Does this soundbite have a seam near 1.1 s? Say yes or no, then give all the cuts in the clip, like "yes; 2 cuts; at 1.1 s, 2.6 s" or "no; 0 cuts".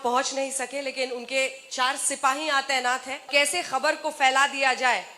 no; 1 cut; at 3.3 s